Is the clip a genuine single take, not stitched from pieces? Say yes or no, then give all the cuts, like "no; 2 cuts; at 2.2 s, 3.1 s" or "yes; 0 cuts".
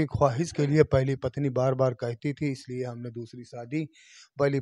yes; 0 cuts